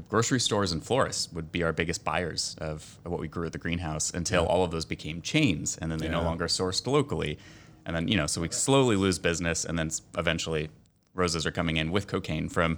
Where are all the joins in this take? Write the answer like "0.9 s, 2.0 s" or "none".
none